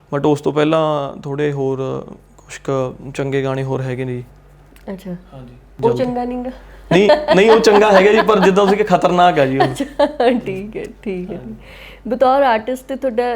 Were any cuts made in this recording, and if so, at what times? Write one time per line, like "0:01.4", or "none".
none